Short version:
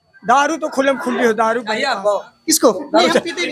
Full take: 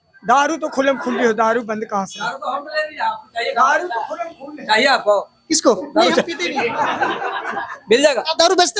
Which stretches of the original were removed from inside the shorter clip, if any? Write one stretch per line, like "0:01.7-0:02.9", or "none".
0:01.8-0:04.8